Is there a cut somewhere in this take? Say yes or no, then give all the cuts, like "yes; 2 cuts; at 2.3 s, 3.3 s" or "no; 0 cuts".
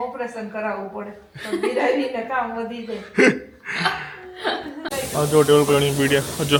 no; 0 cuts